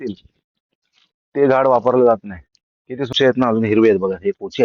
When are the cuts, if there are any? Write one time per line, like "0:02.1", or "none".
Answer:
0:03.1